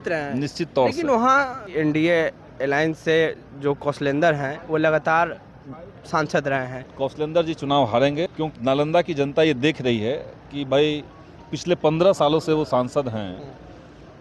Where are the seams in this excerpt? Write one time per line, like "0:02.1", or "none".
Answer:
0:01.7
0:06.8
0:08.3